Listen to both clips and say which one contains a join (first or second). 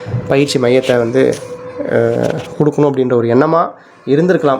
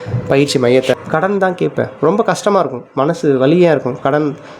second